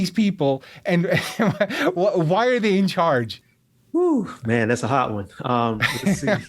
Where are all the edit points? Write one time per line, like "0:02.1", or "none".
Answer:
0:03.4